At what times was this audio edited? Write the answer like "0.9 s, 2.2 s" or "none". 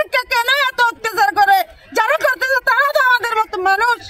none